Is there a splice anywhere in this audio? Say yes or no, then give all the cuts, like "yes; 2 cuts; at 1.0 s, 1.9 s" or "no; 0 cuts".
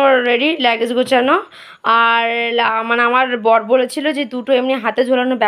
no; 0 cuts